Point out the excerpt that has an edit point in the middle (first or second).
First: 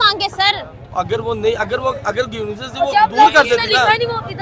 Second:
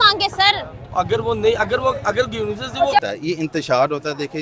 second